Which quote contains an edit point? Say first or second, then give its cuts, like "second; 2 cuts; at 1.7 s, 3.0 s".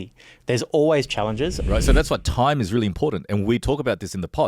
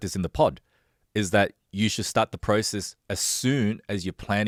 first; 1 cut; at 1.6 s